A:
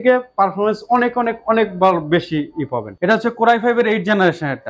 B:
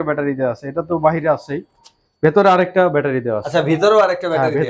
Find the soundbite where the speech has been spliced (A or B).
A